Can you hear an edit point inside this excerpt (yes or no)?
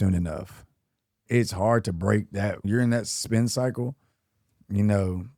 yes